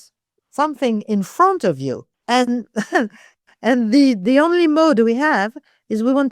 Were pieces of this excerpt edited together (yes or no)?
yes